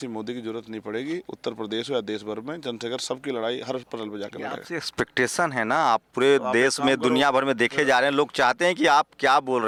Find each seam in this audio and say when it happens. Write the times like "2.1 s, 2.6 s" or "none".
none